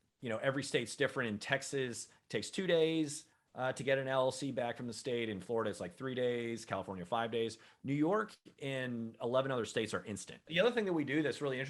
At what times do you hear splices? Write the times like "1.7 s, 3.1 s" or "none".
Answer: 10.5 s